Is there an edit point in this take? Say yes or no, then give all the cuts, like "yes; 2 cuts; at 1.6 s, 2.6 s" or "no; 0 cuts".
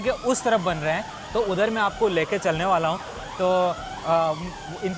no; 0 cuts